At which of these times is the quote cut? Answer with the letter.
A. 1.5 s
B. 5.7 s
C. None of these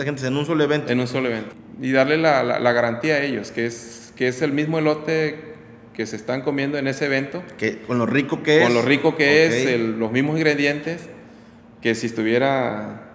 A